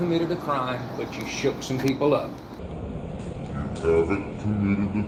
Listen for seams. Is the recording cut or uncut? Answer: uncut